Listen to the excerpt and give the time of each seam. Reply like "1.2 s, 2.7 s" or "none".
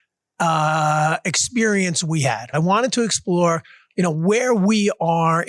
2.5 s